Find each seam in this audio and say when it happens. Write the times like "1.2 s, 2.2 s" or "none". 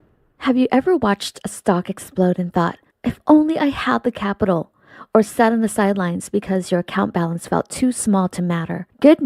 8.0 s